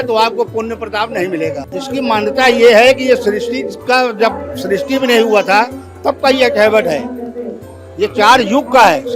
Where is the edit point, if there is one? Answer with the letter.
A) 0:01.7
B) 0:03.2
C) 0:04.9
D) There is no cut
A